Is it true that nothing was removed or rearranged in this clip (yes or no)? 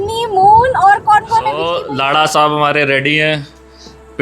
no